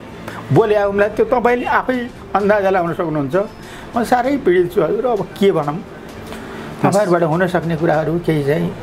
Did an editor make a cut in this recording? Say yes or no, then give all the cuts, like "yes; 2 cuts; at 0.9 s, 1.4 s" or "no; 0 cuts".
no; 0 cuts